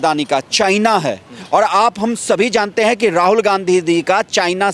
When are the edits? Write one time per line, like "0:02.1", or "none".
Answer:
none